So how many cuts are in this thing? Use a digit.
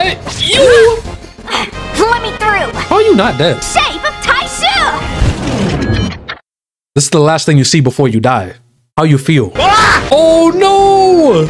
1